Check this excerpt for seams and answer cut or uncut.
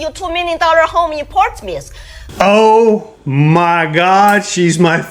cut